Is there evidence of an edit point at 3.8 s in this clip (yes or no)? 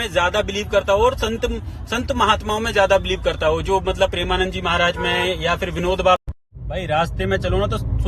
no